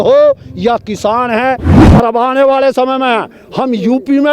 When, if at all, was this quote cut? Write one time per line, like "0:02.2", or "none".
0:01.7

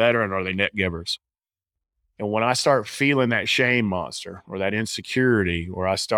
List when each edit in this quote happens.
none

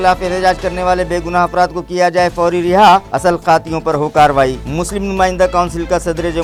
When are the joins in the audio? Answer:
none

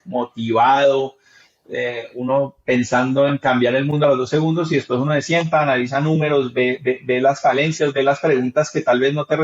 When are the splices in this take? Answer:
none

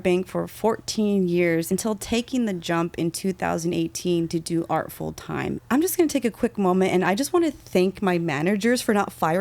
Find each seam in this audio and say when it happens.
0:01.7
0:05.5

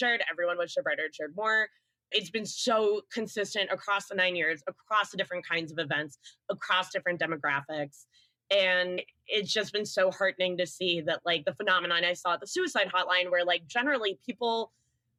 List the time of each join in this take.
none

